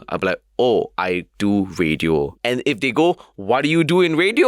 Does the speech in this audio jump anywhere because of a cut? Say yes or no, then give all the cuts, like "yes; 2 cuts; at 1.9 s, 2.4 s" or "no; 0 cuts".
yes; 2 cuts; at 0.9 s, 2.3 s